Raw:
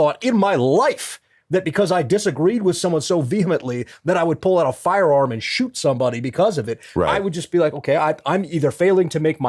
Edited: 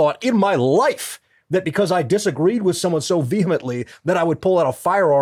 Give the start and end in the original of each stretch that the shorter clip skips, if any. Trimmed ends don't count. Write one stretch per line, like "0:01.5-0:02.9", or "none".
none